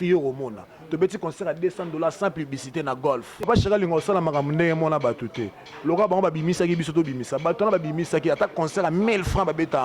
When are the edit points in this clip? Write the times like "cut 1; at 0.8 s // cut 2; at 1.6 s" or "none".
cut 1; at 3.5 s